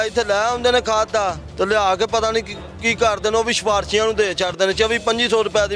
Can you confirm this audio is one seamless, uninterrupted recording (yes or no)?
yes